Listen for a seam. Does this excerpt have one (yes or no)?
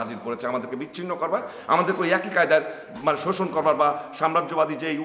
no